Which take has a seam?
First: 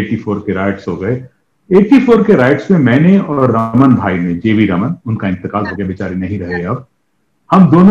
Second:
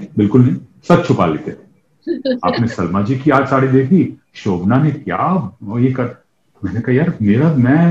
second; 1 cut; at 1.9 s

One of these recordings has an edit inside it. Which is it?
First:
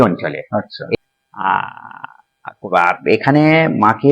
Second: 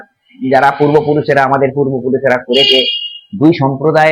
first; 1 cut; at 1.0 s

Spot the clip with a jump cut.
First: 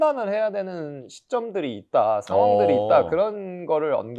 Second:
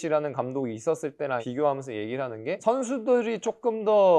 second; 2 cuts; at 1.4 s, 2.6 s

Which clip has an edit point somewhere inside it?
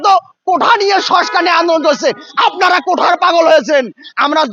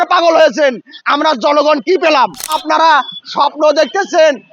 second; 1 cut; at 2.6 s

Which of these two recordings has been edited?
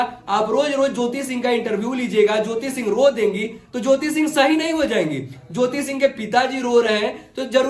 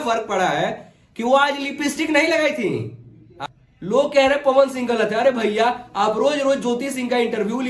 second; 1 cut; at 3.4 s

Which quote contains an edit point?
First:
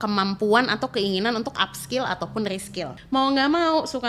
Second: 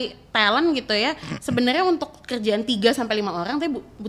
first; 1 cut; at 2.9 s

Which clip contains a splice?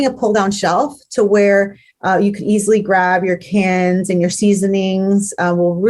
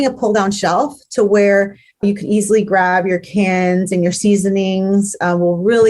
second; 1 cut; at 2.0 s

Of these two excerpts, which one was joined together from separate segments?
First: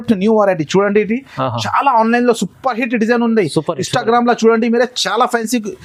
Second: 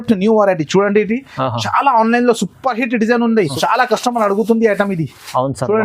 second; 1 cut; at 3.5 s

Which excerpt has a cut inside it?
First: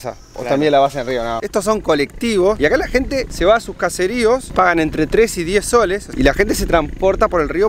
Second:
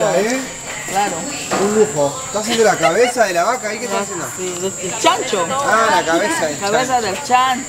first; 3 cuts; at 1.4 s, 2.6 s, 6.1 s

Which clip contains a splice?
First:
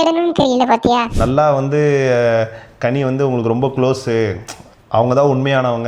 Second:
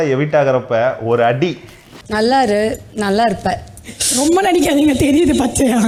first; 1 cut; at 1.1 s

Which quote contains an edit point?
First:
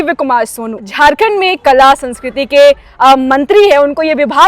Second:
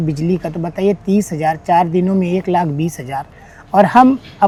first; 1 cut; at 0.9 s

